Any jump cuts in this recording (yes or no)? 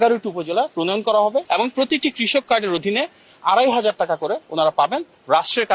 yes